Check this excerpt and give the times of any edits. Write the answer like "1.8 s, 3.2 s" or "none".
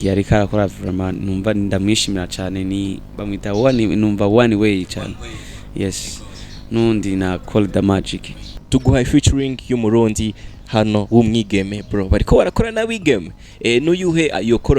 8.6 s